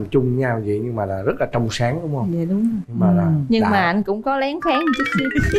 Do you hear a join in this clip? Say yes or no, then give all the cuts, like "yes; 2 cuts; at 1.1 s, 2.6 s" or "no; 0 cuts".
no; 0 cuts